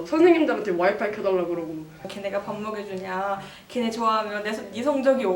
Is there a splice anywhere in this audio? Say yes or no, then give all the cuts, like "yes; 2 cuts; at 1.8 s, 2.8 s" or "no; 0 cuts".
yes; 1 cut; at 2.1 s